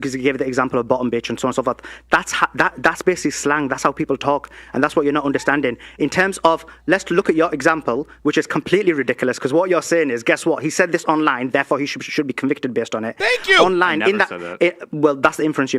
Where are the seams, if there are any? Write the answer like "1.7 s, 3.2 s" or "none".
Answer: 14.8 s